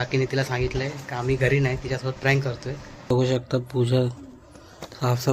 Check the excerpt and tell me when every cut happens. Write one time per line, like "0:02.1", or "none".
0:03.1